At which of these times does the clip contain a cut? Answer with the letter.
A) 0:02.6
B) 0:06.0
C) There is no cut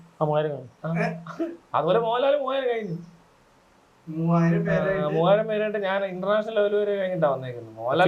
C